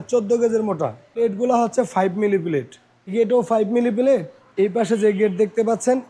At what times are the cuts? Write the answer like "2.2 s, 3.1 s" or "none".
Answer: 1.1 s, 3.1 s, 4.4 s